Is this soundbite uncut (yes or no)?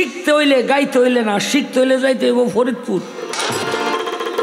no